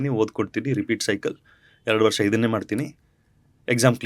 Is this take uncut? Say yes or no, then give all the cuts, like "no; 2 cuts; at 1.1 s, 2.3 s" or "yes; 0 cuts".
yes; 0 cuts